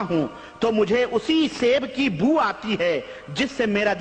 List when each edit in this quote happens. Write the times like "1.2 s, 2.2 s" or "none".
none